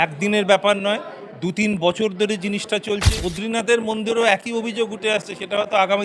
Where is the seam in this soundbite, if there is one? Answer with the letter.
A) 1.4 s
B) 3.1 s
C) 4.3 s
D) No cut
B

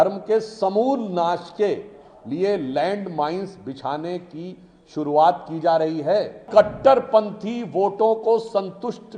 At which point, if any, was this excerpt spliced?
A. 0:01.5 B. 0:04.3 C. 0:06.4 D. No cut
C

